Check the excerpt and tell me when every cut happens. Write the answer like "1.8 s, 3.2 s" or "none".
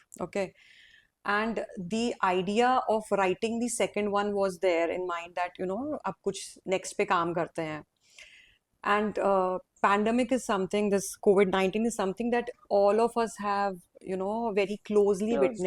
none